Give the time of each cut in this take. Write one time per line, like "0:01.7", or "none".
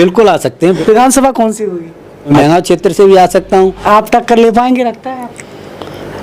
0:00.8
0:02.3
0:03.8